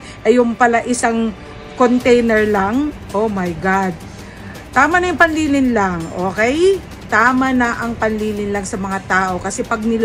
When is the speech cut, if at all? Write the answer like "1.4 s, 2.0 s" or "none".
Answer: none